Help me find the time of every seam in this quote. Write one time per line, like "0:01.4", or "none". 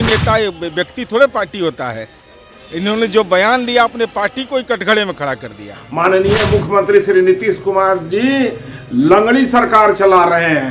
0:05.7